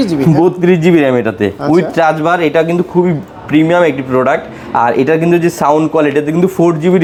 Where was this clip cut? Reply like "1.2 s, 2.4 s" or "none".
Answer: none